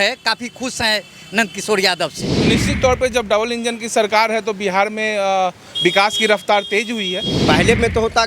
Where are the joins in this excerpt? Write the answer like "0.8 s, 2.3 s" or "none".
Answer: 2.3 s, 7.3 s